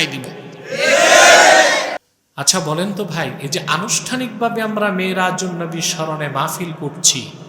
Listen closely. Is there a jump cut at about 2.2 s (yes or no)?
yes